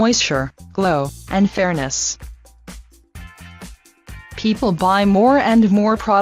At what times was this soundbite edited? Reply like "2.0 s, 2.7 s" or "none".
1.8 s